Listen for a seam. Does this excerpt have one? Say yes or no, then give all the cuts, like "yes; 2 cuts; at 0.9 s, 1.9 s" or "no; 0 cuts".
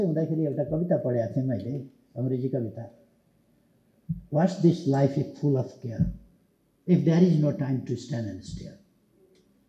no; 0 cuts